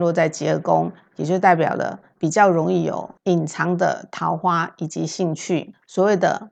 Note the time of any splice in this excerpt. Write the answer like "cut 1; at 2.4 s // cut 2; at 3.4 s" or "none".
none